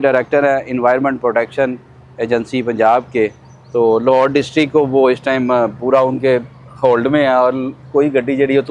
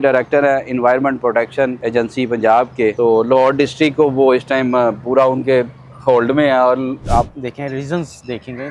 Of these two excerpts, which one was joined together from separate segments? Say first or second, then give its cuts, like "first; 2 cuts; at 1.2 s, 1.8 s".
second; 3 cuts; at 1.8 s, 3.0 s, 7.0 s